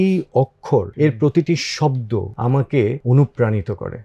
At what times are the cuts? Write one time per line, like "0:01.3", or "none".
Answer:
0:00.9
0:02.3
0:03.0